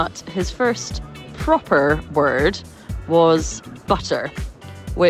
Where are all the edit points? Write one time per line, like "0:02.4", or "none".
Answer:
none